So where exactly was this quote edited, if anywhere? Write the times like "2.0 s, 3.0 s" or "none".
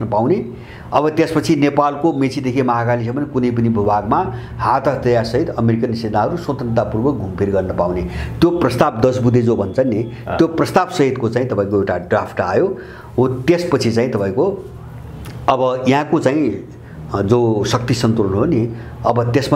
none